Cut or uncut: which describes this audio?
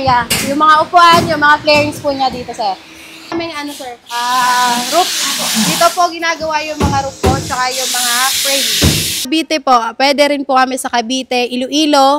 cut